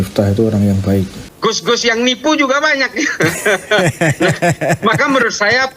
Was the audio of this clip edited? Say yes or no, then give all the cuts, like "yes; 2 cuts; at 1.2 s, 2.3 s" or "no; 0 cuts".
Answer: yes; 1 cut; at 1.2 s